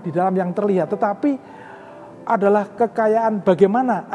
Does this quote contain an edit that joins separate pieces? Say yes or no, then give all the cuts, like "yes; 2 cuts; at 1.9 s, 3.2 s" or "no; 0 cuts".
no; 0 cuts